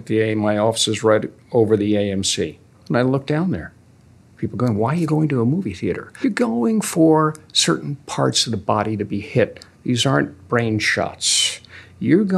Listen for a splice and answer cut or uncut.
cut